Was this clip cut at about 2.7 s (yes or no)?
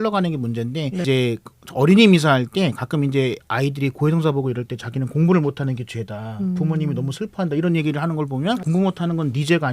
no